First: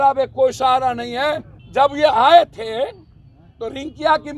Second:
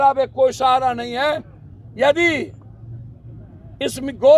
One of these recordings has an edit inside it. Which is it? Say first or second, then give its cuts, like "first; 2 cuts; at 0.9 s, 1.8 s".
first; 1 cut; at 1.5 s